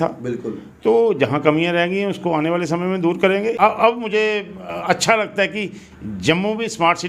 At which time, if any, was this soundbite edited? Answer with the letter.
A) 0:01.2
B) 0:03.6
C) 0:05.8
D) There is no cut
B